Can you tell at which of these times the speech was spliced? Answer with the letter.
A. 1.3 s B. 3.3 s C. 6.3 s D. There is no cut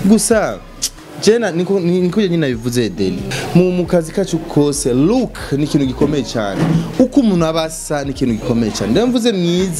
B